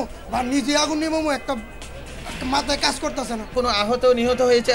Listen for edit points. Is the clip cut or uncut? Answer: cut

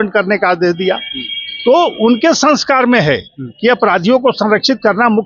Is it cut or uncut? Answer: uncut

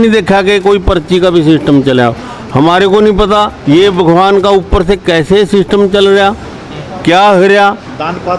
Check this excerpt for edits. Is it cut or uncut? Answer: cut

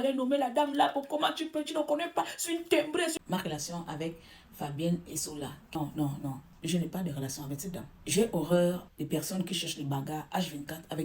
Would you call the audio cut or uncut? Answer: cut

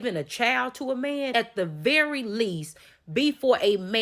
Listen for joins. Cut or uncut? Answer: cut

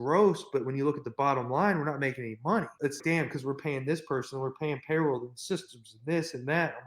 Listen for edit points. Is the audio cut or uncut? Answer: cut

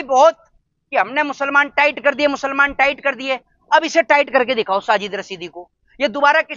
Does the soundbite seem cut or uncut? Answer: uncut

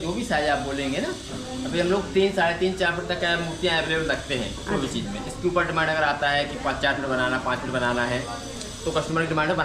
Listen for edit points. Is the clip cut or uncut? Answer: uncut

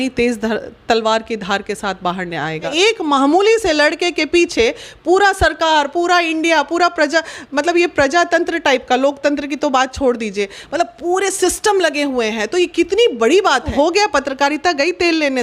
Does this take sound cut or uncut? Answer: cut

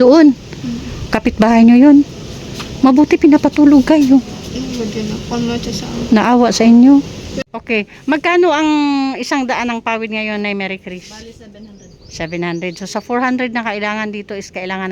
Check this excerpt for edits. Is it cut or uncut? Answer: cut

